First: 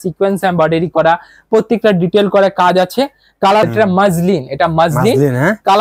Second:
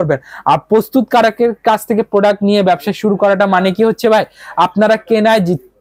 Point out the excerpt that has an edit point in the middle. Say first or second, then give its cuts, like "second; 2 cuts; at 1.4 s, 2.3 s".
first; 1 cut; at 3.6 s